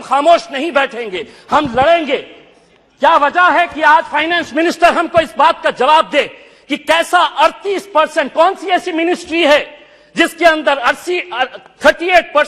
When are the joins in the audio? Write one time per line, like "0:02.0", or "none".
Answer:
none